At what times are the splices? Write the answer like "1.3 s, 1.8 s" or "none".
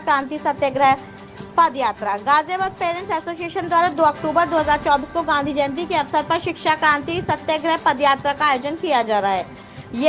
none